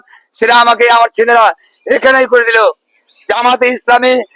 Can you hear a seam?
no; 0 cuts

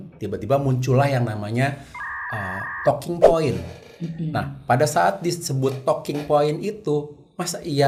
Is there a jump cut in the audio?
no; 0 cuts

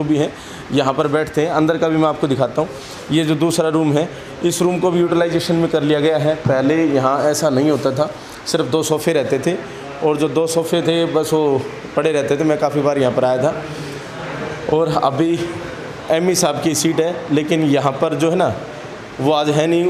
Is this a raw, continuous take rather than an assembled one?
yes; 0 cuts

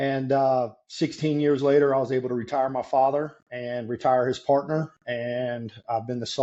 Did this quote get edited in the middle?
no; 0 cuts

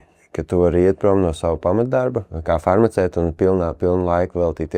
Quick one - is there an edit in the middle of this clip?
yes; 1 cut; at 2.3 s

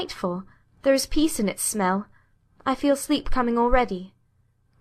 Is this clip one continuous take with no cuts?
no; 1 cut; at 1.6 s

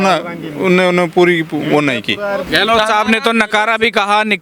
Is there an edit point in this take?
yes; 1 cut; at 2.4 s

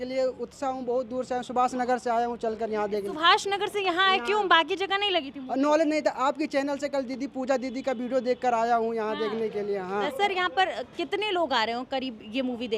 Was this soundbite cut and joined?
yes; 1 cut; at 10.1 s

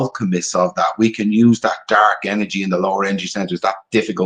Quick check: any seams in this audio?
no; 0 cuts

